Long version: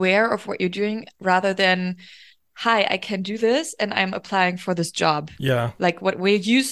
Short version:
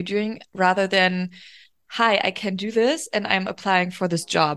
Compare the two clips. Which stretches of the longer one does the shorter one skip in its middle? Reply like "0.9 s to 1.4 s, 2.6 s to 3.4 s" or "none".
none

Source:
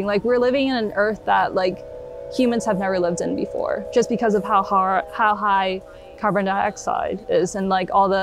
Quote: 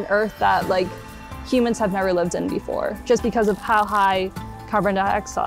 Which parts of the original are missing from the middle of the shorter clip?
4.5 s to 5.1 s

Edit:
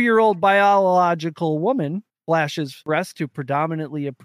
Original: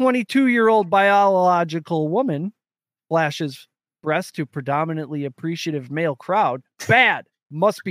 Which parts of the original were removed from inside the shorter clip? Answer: 3.0 s to 3.6 s

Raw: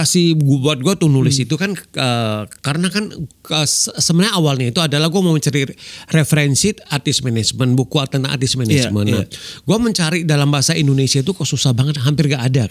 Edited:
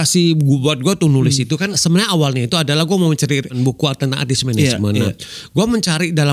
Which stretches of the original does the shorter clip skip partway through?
1.8 s to 4.0 s, 5.8 s to 7.7 s

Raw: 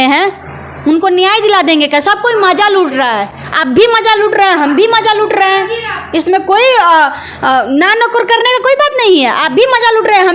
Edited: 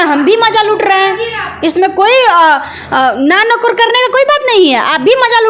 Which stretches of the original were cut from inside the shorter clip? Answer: none

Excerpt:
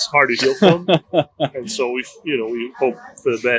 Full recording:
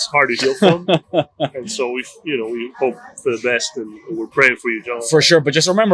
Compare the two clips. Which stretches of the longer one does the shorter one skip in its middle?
none

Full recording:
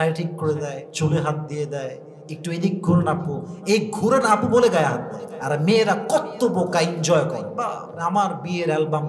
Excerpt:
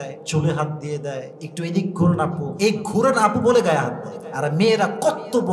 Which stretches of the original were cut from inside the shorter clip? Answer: 2.1 s to 2.3 s, 3.3 s to 3.5 s

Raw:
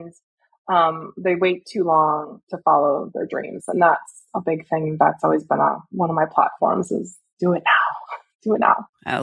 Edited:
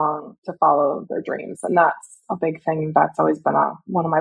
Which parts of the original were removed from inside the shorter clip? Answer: none

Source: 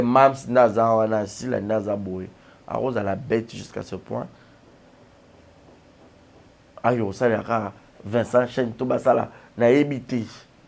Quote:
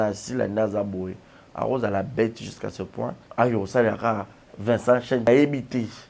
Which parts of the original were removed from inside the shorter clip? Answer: 4.3 s to 6.7 s, 8.7 s to 9.6 s

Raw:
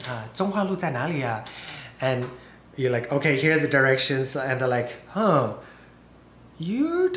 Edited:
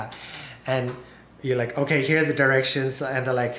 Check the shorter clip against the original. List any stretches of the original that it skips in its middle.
none

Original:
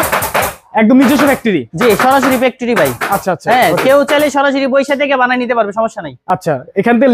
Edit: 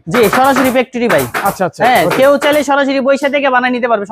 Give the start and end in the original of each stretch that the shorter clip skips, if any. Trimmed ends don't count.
none

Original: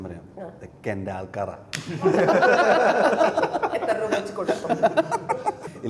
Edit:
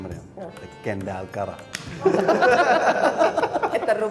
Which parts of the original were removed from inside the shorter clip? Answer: none

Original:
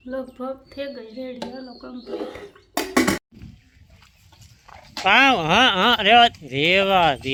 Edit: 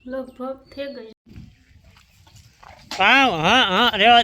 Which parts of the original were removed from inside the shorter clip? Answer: 1.1 s to 3.2 s

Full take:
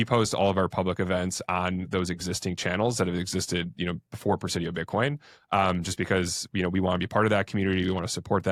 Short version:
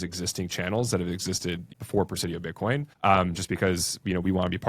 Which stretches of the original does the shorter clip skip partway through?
3.8 s to 4.0 s, 5.2 s to 5.4 s

